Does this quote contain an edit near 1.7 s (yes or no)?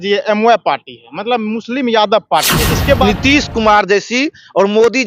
no